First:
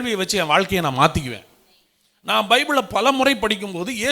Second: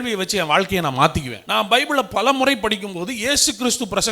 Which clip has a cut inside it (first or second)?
second